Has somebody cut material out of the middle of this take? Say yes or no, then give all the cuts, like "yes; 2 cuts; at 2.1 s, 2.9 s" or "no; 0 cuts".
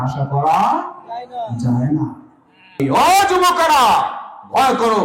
yes; 1 cut; at 2.8 s